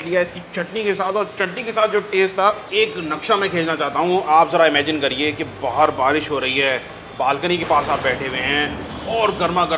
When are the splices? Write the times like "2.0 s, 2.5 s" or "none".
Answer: 2.7 s